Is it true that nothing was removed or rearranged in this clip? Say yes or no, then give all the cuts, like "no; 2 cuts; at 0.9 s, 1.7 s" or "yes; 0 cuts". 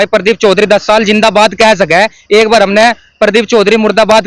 yes; 0 cuts